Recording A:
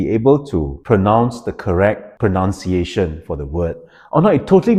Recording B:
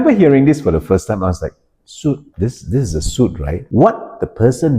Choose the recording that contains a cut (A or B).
B